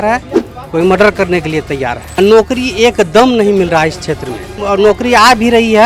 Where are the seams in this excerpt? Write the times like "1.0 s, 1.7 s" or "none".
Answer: 2.2 s, 4.5 s